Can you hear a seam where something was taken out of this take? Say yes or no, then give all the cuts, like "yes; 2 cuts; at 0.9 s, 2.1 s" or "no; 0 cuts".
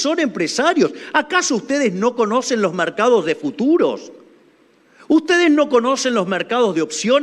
no; 0 cuts